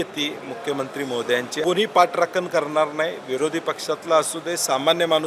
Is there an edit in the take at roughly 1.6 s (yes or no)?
yes